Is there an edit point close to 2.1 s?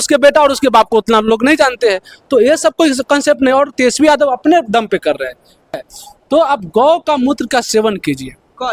no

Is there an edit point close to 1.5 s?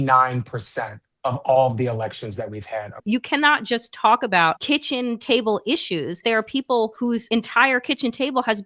no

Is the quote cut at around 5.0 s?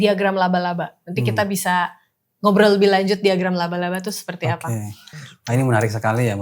yes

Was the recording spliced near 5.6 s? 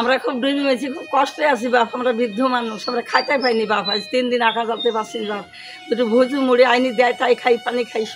no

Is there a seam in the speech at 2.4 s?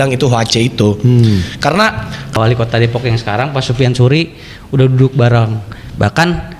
yes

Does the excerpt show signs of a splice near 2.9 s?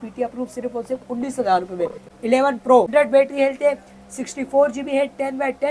yes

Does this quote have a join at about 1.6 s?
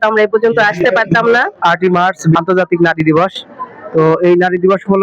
yes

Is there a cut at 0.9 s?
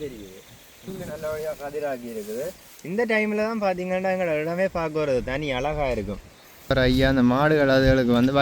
yes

